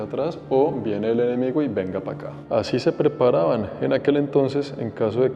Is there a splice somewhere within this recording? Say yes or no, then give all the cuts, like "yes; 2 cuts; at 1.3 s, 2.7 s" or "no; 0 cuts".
yes; 1 cut; at 2.4 s